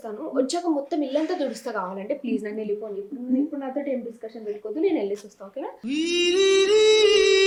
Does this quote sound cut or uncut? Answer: uncut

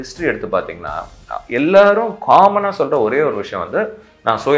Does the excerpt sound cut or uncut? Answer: uncut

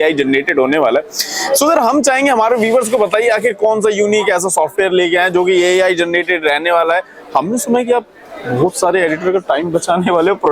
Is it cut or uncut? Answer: uncut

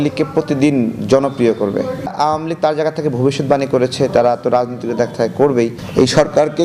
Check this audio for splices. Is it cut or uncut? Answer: cut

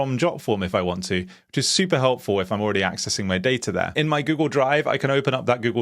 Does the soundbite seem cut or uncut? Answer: cut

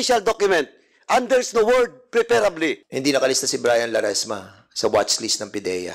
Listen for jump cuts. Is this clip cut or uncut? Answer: cut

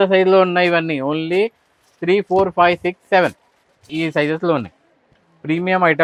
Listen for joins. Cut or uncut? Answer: uncut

